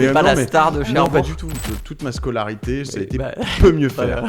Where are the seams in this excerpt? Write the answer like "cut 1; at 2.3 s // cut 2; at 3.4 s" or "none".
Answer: cut 1; at 1.7 s